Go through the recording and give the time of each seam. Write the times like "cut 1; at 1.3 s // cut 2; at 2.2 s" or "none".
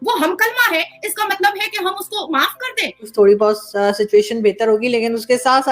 cut 1; at 3.0 s